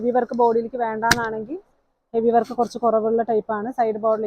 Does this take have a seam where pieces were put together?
no; 0 cuts

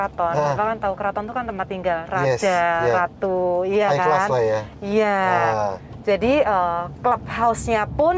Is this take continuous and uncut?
yes; 0 cuts

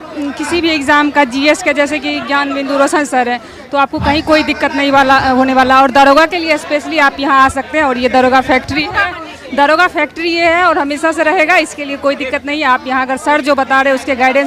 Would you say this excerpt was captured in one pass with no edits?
yes; 0 cuts

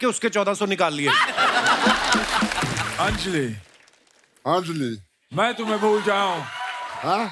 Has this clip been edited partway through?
yes; 1 cut; at 2.9 s

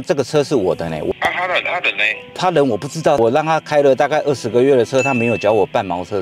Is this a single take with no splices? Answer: no; 2 cuts; at 1.1 s, 3.2 s

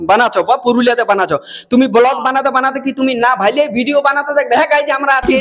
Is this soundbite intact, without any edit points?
yes; 0 cuts

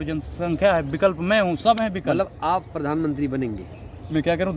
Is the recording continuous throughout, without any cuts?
yes; 0 cuts

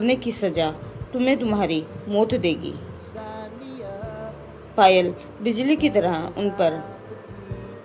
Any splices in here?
yes; 2 cuts; at 3.3 s, 4.5 s

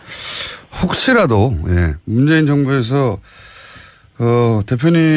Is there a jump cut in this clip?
yes; 1 cut; at 1.9 s

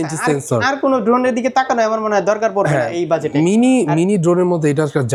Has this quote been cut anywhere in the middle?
no; 0 cuts

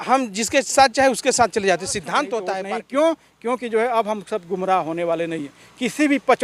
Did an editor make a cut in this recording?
yes; 1 cut; at 2.5 s

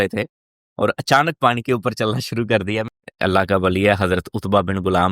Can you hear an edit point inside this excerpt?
yes; 1 cut; at 2.8 s

